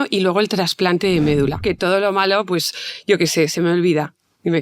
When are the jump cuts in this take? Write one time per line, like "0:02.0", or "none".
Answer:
0:01.6